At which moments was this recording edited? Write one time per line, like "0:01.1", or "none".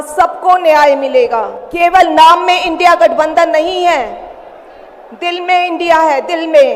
0:01.6

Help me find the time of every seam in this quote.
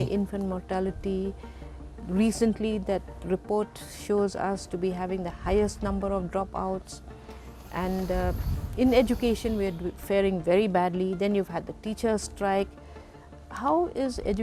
none

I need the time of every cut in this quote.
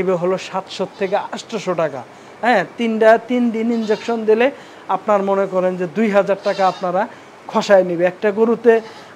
none

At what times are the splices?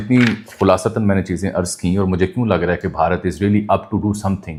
none

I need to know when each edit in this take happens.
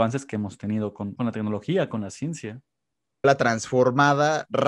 0:01.1
0:03.2

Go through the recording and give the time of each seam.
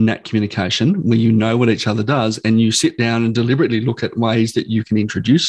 none

